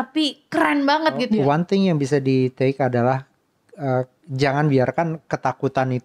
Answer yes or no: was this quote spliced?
yes